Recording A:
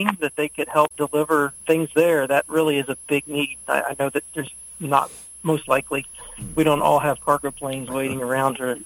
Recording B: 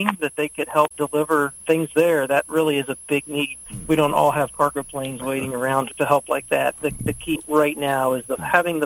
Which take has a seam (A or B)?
B